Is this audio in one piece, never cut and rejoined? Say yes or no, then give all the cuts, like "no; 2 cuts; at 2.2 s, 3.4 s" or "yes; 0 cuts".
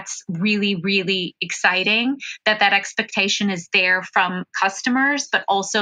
yes; 0 cuts